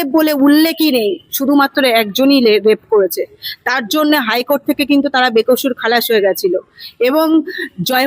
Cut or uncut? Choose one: uncut